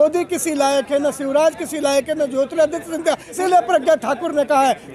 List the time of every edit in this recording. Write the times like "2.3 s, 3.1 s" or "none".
3.4 s